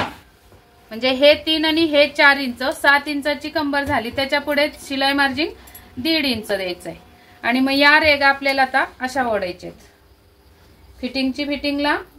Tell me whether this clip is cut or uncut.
uncut